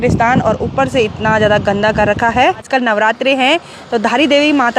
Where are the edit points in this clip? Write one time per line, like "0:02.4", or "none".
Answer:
0:02.6